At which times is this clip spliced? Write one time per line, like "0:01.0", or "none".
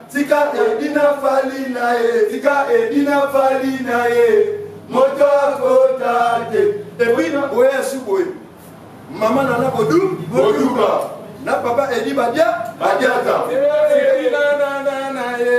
0:13.5